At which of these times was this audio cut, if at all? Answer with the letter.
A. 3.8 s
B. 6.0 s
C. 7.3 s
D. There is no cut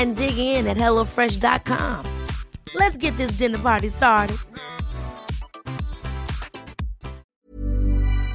C